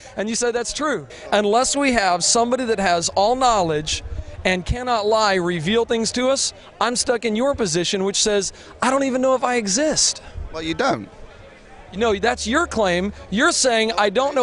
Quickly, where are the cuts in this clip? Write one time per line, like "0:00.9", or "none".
0:01.1